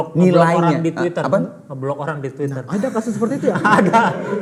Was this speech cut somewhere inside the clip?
no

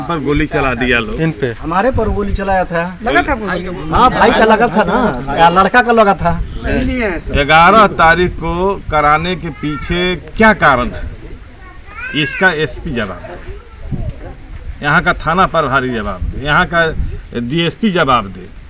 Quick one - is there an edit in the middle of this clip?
yes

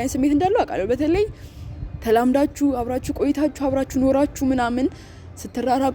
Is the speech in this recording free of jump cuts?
yes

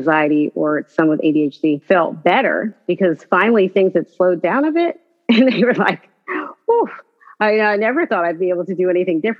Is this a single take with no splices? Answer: no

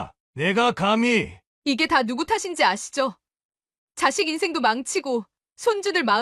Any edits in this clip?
no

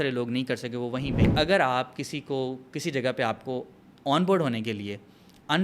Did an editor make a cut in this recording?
yes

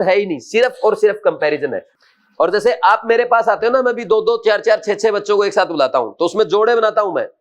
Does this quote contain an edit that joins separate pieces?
yes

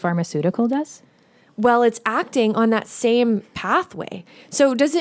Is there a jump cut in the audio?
no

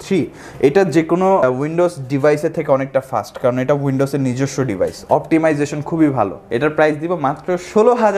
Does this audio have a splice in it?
yes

